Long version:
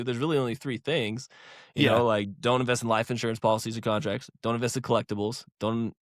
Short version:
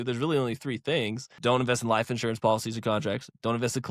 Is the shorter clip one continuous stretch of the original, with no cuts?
no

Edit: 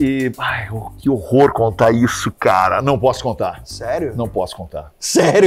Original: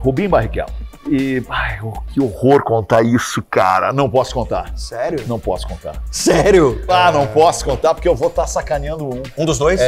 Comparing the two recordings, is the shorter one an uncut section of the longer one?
yes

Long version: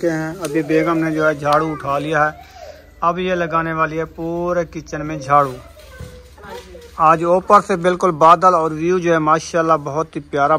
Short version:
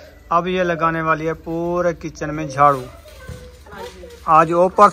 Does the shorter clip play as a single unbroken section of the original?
yes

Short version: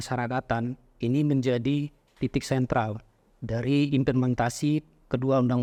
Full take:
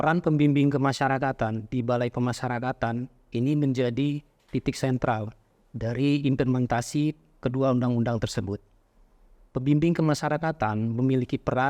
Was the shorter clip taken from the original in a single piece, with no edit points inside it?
yes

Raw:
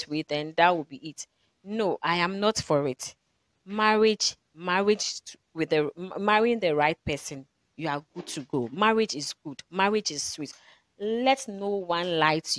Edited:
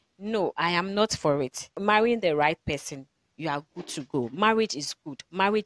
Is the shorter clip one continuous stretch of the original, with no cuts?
no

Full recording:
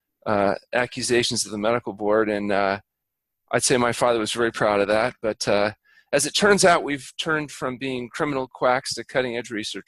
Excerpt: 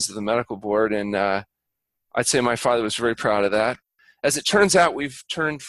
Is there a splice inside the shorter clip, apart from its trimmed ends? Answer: yes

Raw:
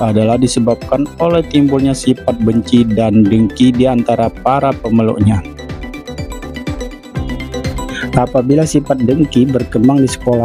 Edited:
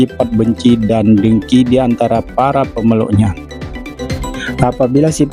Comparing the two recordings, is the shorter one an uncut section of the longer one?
no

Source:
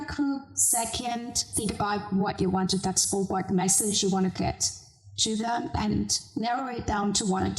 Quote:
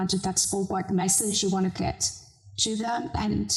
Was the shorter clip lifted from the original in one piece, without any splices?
yes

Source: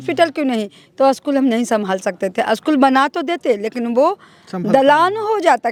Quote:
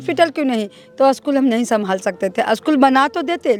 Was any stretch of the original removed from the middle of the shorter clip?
no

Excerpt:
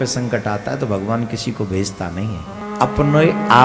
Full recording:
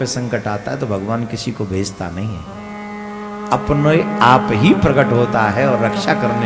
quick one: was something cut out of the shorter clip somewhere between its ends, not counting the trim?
yes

